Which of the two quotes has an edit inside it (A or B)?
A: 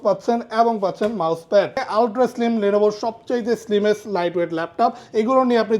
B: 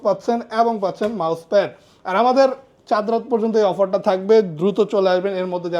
A